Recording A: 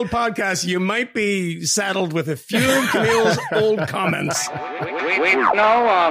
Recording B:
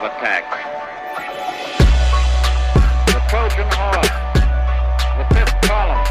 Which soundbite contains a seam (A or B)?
A